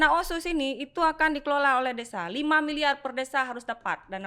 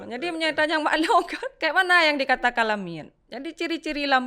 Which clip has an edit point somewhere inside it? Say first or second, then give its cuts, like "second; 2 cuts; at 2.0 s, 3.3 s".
second; 1 cut; at 1.4 s